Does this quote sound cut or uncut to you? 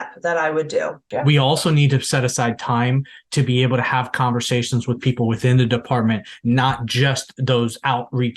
cut